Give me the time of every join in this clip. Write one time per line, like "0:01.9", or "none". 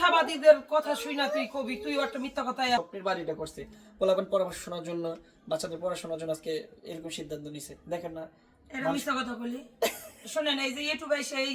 0:02.8